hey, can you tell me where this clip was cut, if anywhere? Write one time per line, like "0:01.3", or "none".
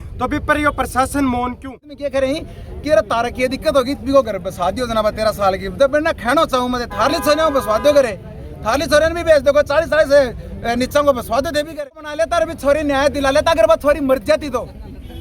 0:02.0
0:12.0